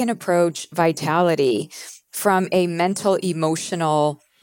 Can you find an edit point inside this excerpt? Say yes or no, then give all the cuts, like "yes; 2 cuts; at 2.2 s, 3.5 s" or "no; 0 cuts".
no; 0 cuts